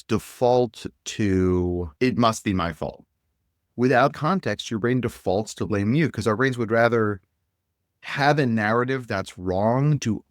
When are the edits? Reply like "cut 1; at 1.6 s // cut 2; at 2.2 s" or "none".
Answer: cut 1; at 1.9 s